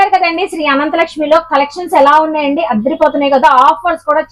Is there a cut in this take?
no; 0 cuts

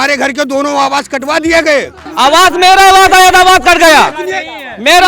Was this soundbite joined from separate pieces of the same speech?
yes; 1 cut; at 2.0 s

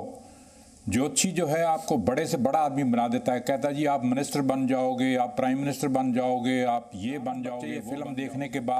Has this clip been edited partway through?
yes; 1 cut; at 7.7 s

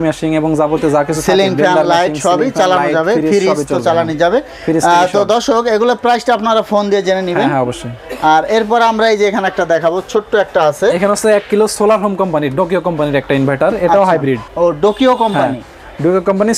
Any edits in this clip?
no; 0 cuts

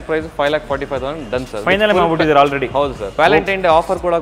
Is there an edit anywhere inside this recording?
yes; 1 cut; at 3.0 s

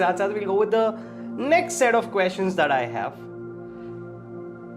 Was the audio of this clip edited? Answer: no; 0 cuts

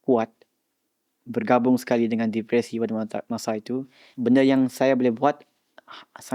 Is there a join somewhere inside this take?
yes; 1 cut; at 4.0 s

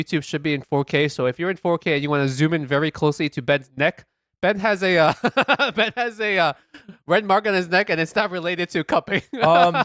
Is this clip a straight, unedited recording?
yes; 0 cuts

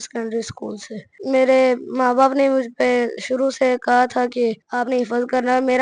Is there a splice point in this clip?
yes; 2 cuts; at 1.2 s, 4.6 s

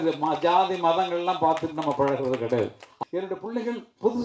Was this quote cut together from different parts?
yes; 1 cut; at 2.9 s

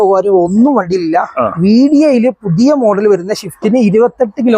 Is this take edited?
no; 0 cuts

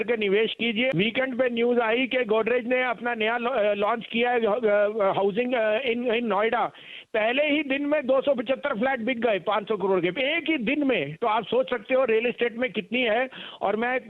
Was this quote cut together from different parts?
yes; 1 cut; at 0.9 s

